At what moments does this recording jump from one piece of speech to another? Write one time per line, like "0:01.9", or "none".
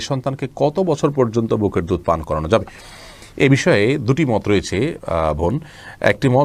none

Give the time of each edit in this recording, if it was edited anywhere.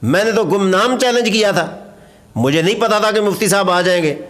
none

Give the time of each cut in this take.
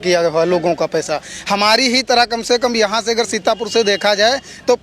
none

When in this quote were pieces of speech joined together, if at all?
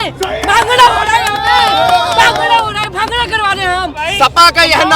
0:04.0

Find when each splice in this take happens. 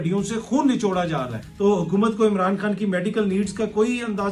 0:01.4

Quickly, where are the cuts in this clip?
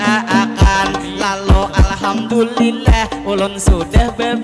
0:00.9

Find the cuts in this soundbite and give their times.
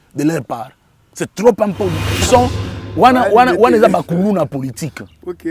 0:02.2

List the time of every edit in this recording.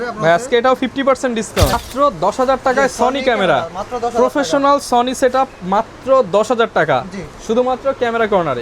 0:01.7

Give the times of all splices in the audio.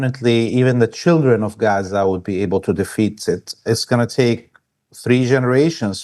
0:03.6

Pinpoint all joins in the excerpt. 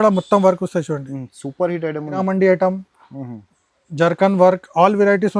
0:02.2

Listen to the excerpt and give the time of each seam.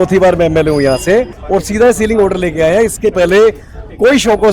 0:01.4

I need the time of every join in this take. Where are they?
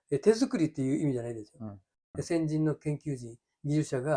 0:01.9

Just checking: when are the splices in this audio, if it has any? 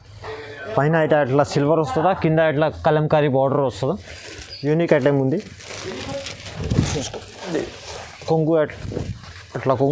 none

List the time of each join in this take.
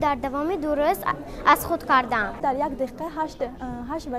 0:02.4

